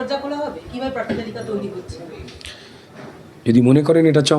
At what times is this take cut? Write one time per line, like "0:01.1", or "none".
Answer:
0:03.1